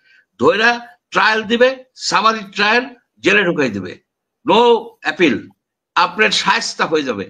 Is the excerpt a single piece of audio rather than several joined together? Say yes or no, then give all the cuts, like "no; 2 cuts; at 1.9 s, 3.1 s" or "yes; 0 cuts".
yes; 0 cuts